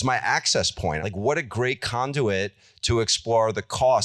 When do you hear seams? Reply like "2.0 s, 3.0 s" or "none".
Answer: 1.0 s